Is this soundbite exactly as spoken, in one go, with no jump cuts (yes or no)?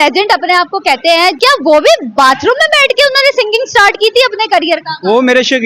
no